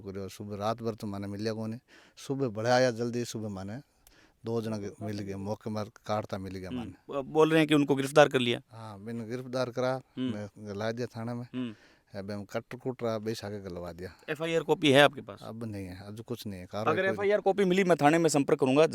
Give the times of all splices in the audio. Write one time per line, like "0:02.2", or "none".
none